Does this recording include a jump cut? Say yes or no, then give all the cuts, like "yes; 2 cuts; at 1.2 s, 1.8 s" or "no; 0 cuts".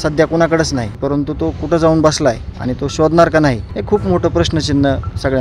yes; 2 cuts; at 1.0 s, 3.7 s